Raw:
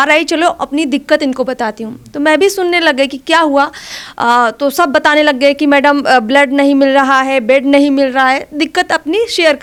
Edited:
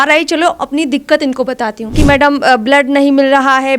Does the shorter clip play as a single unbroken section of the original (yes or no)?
no